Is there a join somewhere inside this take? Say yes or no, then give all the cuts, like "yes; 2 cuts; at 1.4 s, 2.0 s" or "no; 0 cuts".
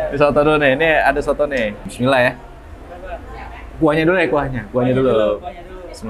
yes; 1 cut; at 1.8 s